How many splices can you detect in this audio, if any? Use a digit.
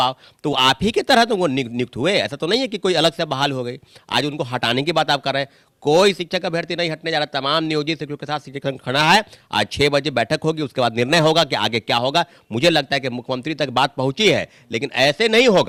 0